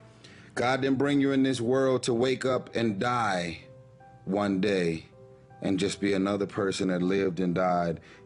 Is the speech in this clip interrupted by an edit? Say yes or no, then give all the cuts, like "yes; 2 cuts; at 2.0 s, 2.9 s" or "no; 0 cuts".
no; 0 cuts